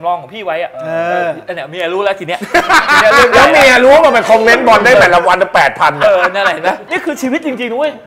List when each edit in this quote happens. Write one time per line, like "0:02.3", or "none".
0:06.8